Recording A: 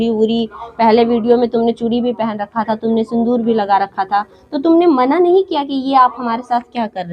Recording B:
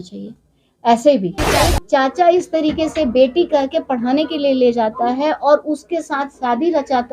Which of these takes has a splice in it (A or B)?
B